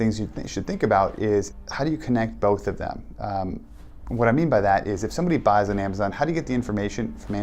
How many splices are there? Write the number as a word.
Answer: one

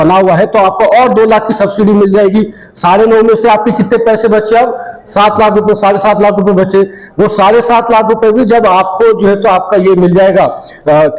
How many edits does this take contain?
zero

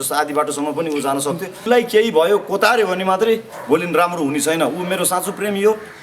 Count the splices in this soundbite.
one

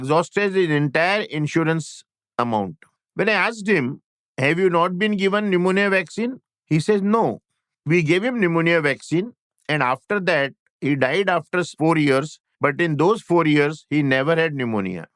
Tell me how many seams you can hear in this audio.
one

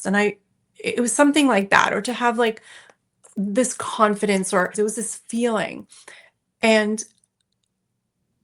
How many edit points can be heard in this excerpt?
one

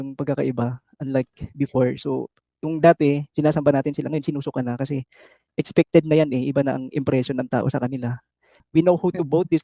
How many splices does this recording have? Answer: one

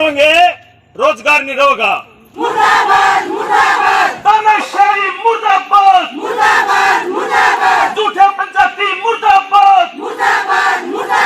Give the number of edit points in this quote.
one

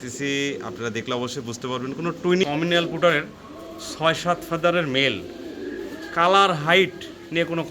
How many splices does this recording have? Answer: one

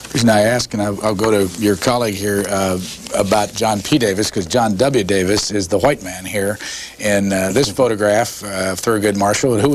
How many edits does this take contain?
one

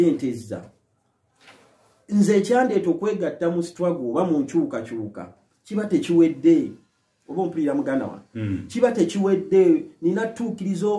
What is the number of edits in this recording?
zero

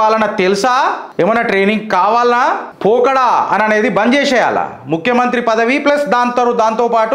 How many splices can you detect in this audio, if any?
two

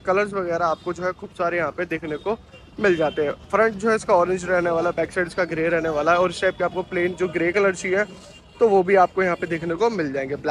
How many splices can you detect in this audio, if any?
zero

